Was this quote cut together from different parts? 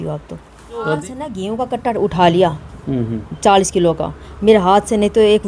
yes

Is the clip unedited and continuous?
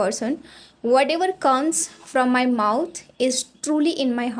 yes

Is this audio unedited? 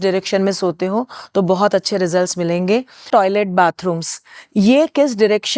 no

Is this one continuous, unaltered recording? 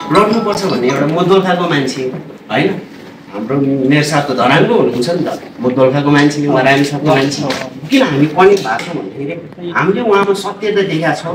yes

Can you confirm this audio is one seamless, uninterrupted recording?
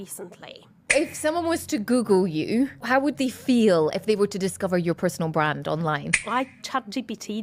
no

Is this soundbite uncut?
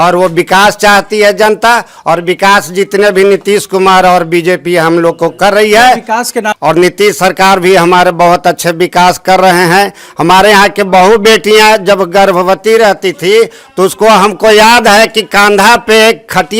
no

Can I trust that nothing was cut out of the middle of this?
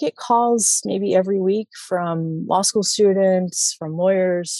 yes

